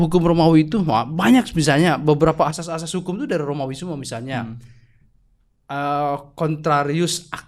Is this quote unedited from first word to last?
yes; 0 cuts

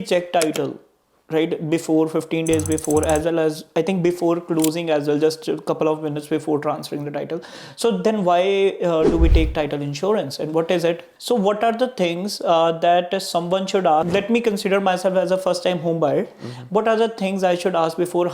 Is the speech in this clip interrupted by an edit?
yes; 2 cuts; at 11.1 s, 14.1 s

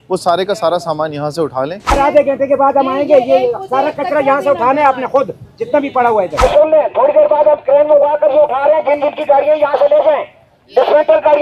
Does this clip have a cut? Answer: yes; 2 cuts; at 1.9 s, 6.3 s

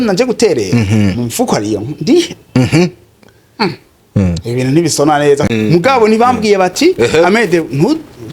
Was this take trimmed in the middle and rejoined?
yes; 1 cut; at 5.5 s

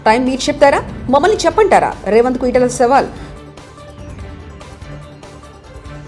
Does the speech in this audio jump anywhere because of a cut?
no; 0 cuts

